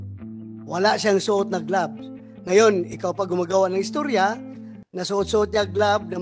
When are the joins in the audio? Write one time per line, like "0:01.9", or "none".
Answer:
none